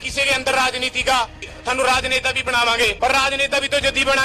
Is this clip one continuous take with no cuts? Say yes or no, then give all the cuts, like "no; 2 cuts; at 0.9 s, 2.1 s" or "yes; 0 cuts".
no; 2 cuts; at 1.4 s, 2.9 s